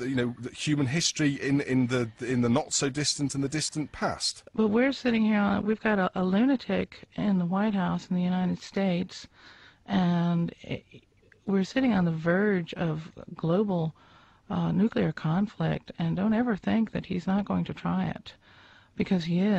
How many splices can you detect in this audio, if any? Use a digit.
1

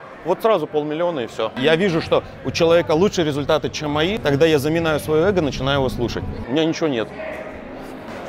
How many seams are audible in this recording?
3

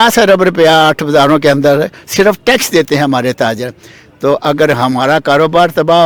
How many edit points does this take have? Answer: 0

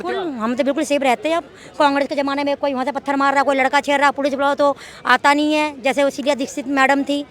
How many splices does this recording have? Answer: 0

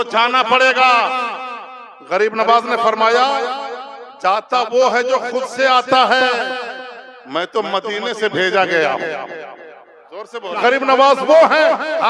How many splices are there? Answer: 1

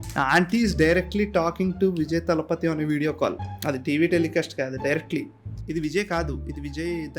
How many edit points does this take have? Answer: 1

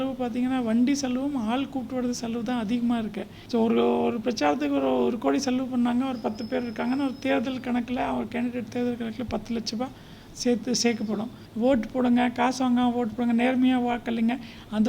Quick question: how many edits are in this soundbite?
2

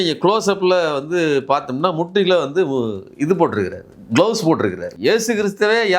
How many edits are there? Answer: 1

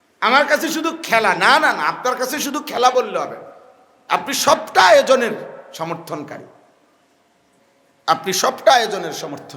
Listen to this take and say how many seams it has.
1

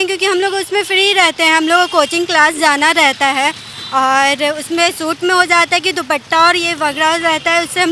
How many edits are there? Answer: 0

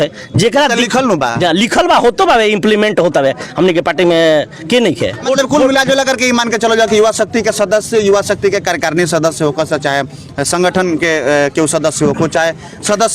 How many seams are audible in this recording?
0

